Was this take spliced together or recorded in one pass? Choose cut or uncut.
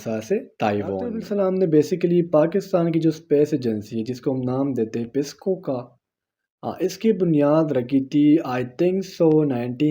cut